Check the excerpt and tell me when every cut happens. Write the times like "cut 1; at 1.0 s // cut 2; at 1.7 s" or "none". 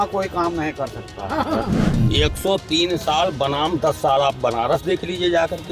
cut 1; at 1.7 s